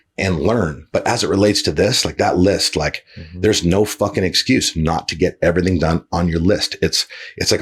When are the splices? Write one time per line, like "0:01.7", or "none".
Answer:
none